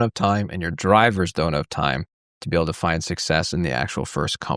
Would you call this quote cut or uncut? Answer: uncut